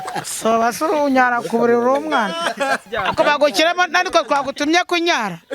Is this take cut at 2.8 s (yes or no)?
yes